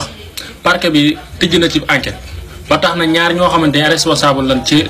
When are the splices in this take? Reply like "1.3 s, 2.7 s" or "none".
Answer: none